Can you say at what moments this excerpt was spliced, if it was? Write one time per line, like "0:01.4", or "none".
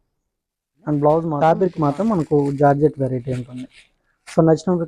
0:01.4